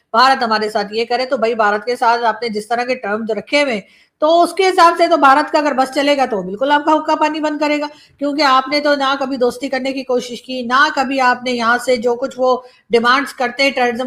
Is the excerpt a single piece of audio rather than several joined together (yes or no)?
yes